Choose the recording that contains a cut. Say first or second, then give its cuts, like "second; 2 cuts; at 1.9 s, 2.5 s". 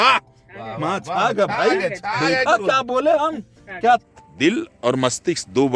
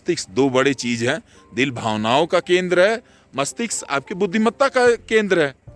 first; 1 cut; at 4.0 s